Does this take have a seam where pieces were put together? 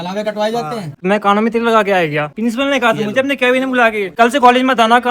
yes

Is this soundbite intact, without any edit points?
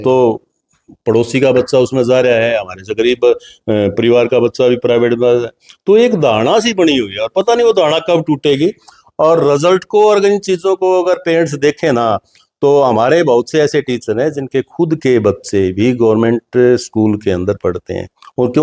yes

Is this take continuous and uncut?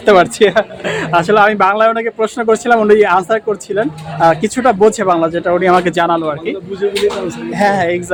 yes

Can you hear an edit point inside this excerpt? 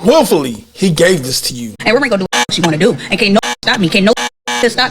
yes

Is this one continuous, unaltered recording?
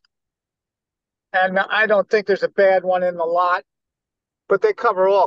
no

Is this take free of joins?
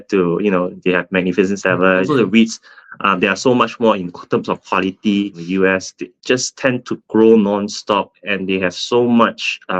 no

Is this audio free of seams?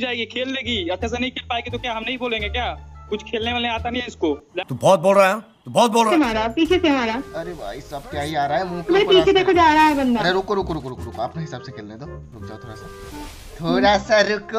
no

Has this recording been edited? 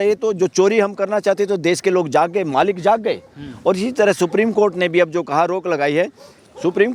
no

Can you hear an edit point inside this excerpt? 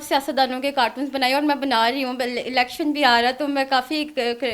no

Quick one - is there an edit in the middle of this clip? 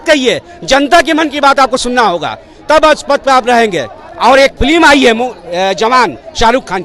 no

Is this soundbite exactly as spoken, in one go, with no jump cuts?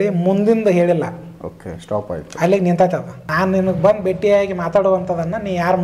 no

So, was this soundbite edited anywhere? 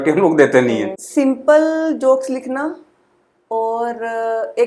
yes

